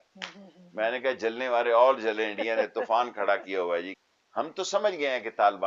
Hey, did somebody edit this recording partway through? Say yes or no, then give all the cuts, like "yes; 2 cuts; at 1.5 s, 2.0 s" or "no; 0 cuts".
yes; 1 cut; at 3.9 s